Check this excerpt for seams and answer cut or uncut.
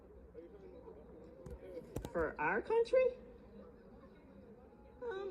uncut